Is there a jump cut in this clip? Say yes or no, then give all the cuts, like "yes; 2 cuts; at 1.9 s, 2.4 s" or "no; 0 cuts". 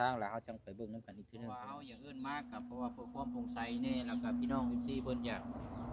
yes; 1 cut; at 1.5 s